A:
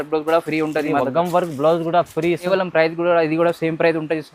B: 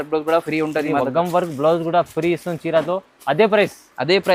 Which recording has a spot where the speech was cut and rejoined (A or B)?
A